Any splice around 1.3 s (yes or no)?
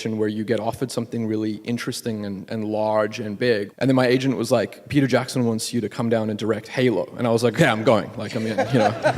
no